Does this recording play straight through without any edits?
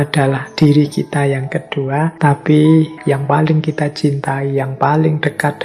no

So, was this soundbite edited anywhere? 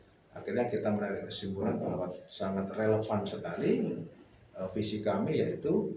no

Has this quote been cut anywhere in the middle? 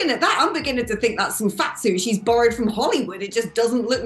no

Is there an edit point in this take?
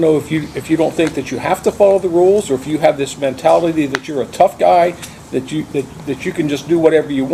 no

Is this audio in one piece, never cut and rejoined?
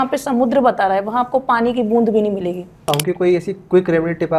no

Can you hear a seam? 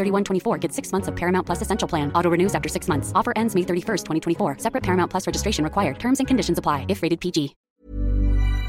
yes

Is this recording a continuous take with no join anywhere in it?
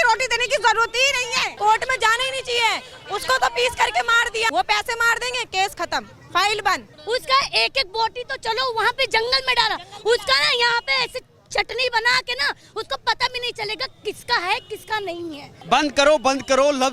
no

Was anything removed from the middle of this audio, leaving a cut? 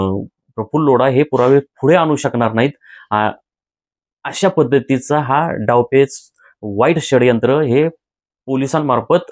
no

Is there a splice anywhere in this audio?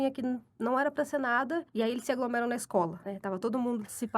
yes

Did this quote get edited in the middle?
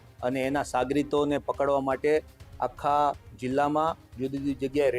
no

